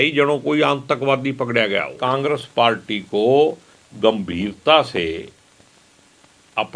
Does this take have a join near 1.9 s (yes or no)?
yes